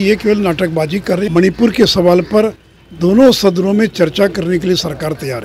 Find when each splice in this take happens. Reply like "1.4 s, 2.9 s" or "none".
1.3 s